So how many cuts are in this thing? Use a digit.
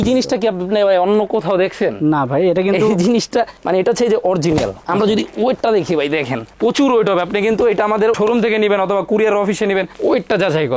2